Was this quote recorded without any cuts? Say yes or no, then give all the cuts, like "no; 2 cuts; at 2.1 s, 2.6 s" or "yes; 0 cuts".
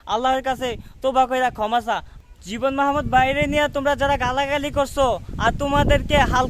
no; 1 cut; at 2.2 s